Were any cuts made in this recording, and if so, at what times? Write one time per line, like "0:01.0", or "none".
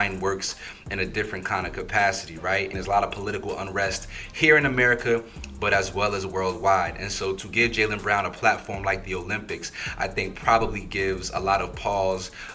0:02.8